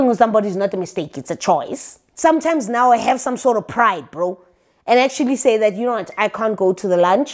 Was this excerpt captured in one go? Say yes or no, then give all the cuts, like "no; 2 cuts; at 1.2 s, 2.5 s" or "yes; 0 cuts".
no; 1 cut; at 2.0 s